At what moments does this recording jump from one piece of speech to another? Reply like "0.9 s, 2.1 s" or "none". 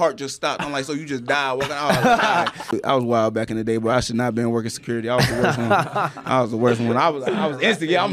2.7 s